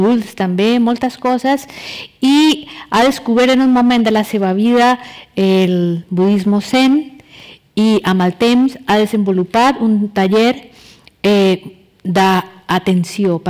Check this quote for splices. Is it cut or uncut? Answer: uncut